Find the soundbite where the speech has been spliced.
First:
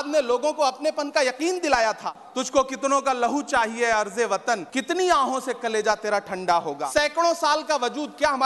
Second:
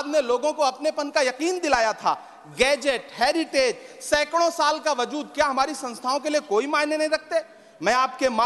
first; 3 cuts; at 2.2 s, 4.7 s, 6.8 s

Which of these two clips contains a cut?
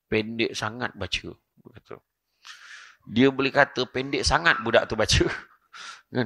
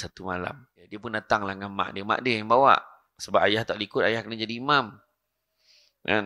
second; 1 cut; at 1.0 s

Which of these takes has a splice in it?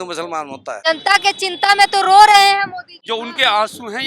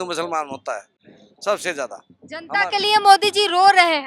first; 2 cuts; at 0.9 s, 2.9 s

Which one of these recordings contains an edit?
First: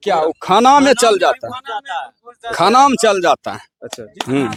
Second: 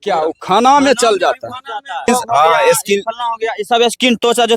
second; 1 cut; at 2.1 s

